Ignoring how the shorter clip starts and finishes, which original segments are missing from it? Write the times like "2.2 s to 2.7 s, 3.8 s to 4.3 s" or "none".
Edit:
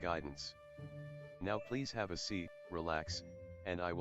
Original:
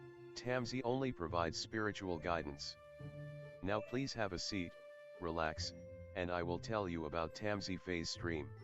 4.8 s to 5.1 s

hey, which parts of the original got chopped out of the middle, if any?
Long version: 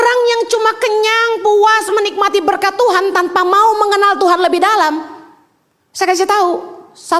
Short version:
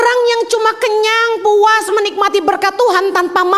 none

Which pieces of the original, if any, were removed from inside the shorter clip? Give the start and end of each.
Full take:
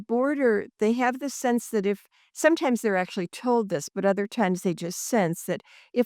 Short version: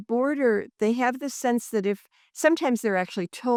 none

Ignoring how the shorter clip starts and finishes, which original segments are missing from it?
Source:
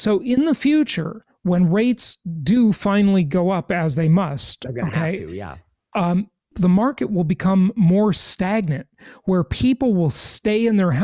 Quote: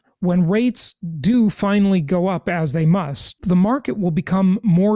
4.5 s to 6.4 s

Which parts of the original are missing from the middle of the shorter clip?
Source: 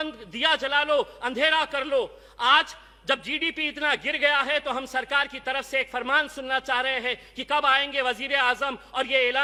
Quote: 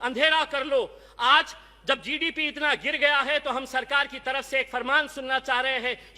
none

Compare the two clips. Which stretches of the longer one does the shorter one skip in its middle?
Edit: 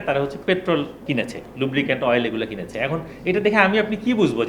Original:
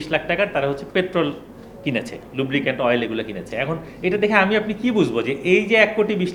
1.4 s to 1.7 s

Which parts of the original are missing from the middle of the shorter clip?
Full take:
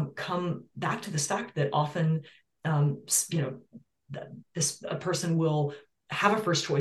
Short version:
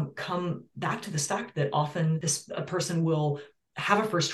2.2 s to 4.5 s

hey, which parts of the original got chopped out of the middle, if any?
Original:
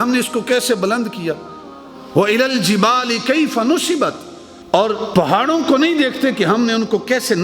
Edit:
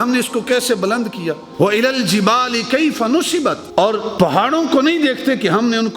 1.4 s to 2.0 s, 4.2 s to 4.6 s

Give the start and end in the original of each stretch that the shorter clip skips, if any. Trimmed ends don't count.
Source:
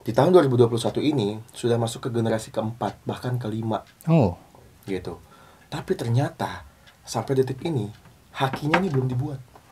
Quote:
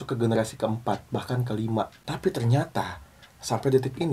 3.9 s to 5.6 s

